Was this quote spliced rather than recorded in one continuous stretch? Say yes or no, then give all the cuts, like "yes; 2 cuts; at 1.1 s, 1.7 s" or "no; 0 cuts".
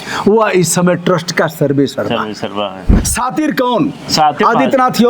yes; 1 cut; at 3.0 s